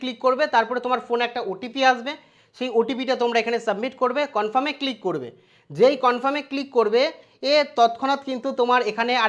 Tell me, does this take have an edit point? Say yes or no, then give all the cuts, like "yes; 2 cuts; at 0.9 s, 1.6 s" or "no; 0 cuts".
no; 0 cuts